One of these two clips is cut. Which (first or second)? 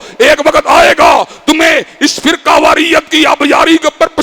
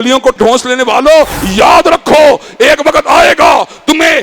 second